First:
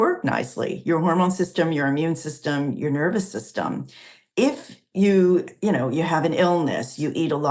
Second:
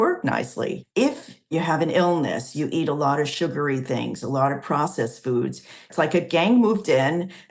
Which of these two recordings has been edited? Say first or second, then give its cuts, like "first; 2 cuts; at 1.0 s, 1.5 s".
second; 2 cuts; at 1.0 s, 5.9 s